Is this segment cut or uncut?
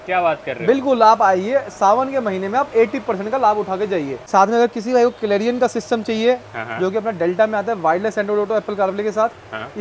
cut